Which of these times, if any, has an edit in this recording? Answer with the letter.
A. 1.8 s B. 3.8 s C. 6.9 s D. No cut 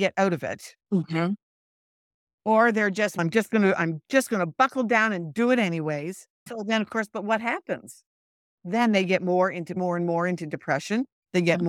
D